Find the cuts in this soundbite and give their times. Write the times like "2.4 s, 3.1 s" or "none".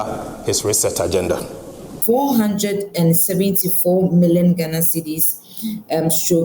1.9 s